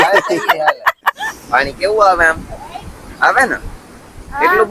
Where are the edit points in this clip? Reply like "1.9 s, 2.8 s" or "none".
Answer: 1.2 s